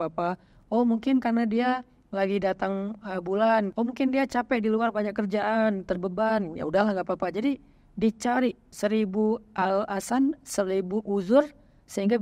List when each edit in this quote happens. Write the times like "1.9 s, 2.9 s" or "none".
3.7 s, 8.7 s